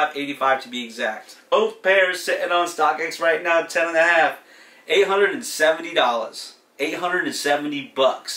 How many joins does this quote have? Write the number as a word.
one